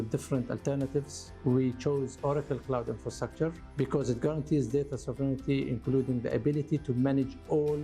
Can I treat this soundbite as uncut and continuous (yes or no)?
no